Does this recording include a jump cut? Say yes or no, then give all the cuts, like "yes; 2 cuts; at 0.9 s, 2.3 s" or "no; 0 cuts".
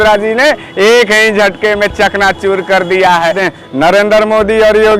yes; 1 cut; at 3.4 s